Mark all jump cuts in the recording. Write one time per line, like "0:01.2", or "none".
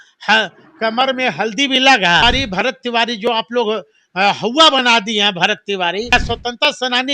0:02.2
0:06.1